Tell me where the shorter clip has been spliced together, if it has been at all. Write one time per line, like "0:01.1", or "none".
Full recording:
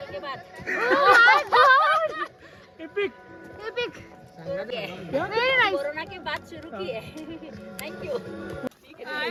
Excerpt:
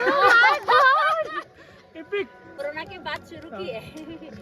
0:02.6